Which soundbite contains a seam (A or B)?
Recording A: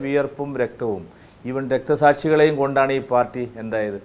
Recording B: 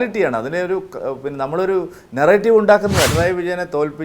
B